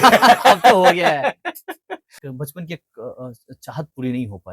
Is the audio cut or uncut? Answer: cut